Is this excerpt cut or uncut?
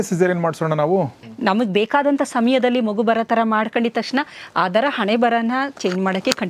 cut